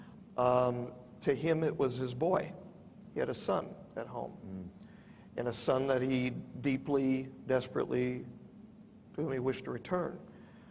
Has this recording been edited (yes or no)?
no